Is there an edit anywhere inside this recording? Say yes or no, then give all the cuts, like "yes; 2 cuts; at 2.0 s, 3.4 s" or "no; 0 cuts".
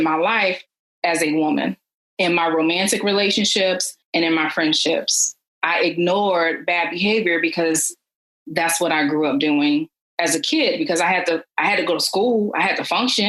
no; 0 cuts